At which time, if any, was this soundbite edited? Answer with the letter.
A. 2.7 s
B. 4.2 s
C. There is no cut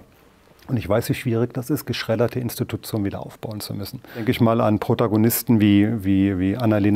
B